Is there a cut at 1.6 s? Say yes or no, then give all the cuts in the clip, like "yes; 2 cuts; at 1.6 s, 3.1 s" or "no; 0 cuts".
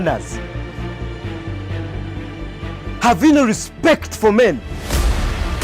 yes; 1 cut; at 1.6 s